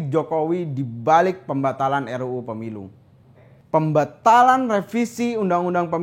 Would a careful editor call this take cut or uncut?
cut